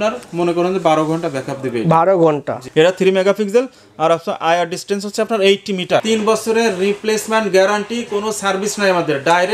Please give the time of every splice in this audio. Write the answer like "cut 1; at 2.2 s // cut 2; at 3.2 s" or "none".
cut 1; at 2.6 s // cut 2; at 6.0 s